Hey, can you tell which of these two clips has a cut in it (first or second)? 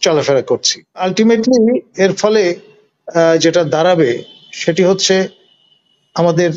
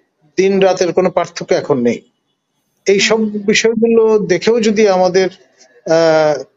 first